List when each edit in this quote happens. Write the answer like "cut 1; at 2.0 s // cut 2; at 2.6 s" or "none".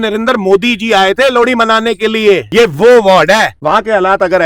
cut 1; at 2.5 s // cut 2; at 3.6 s